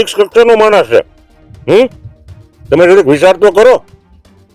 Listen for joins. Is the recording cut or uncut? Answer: uncut